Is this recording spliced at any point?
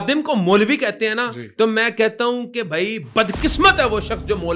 no; 0 cuts

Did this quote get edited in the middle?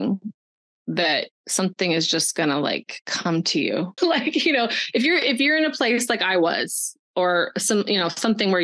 yes; 1 cut; at 3.9 s

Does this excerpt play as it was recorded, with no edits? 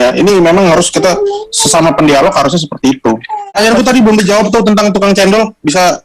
no; 1 cut; at 3.3 s

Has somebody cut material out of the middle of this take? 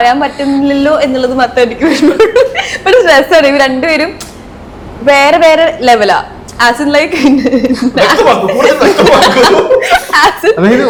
no; 0 cuts

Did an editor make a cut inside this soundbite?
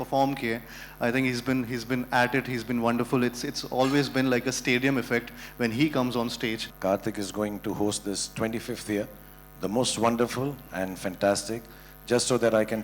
yes; 1 cut; at 6.7 s

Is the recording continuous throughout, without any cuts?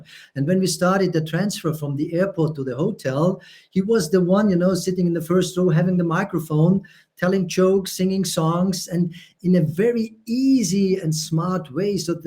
yes; 0 cuts

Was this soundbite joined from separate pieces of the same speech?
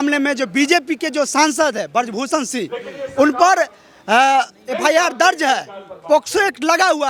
no; 0 cuts

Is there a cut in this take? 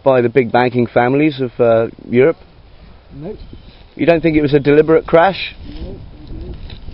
no; 0 cuts

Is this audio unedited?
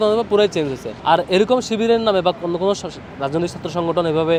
yes; 0 cuts

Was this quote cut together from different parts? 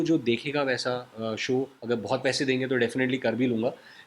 yes; 1 cut; at 1.8 s

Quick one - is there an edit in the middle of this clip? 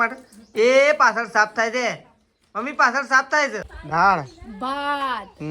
yes; 1 cut; at 3.7 s

